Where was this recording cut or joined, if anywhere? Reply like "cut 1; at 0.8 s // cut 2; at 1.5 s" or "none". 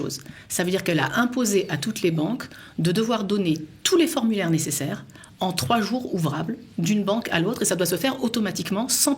none